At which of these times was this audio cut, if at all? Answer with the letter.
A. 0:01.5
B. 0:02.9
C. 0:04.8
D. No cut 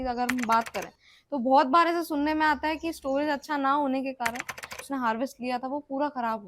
C